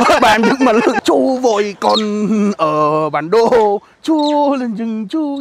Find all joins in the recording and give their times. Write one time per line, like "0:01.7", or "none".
0:01.0